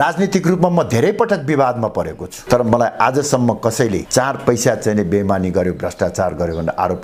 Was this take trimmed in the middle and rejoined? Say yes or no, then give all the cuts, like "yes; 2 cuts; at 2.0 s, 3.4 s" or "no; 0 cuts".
no; 0 cuts